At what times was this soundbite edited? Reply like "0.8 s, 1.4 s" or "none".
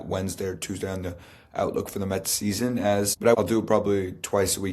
3.2 s